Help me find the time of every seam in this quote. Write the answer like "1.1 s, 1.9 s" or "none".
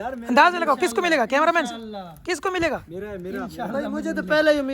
3.8 s